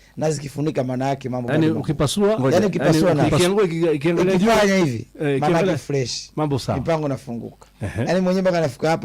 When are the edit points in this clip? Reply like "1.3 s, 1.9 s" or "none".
1.4 s